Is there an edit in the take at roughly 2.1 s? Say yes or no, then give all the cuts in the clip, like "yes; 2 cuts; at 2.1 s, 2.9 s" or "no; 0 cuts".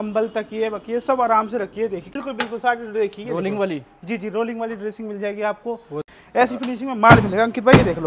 yes; 2 cuts; at 2.1 s, 6.1 s